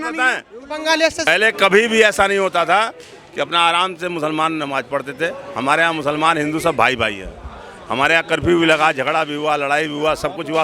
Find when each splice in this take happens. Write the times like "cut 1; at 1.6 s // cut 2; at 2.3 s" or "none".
cut 1; at 1.3 s